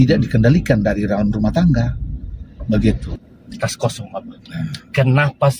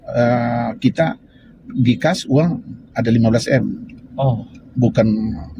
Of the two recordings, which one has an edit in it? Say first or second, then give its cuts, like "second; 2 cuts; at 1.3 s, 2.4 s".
first; 1 cut; at 3.1 s